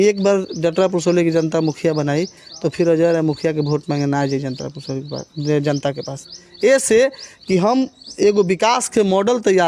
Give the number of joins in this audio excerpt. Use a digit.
0